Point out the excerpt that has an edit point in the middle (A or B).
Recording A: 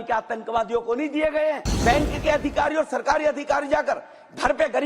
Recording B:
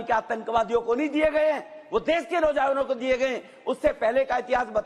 A